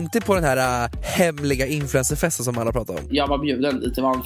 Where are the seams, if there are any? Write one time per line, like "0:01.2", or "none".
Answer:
0:01.0
0:03.0